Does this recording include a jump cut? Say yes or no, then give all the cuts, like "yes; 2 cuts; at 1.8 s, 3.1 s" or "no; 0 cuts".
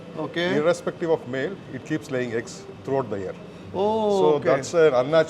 yes; 1 cut; at 3.5 s